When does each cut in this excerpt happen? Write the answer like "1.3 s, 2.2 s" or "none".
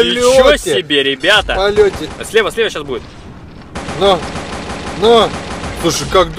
2.1 s